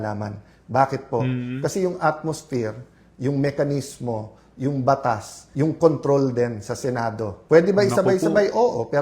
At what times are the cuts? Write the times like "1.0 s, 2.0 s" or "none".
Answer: 5.4 s, 7.3 s